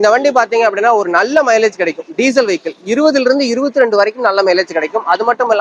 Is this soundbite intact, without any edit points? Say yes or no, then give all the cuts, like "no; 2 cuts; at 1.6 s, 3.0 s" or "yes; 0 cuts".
yes; 0 cuts